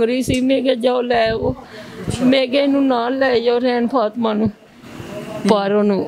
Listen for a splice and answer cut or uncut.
uncut